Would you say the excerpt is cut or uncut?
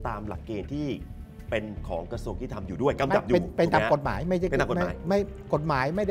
uncut